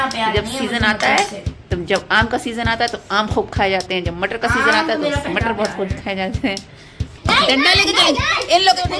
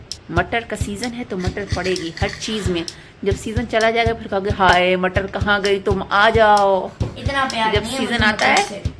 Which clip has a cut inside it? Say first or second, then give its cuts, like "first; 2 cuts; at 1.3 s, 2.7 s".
first; 1 cut; at 7.1 s